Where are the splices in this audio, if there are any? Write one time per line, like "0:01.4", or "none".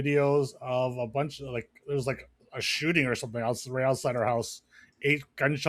none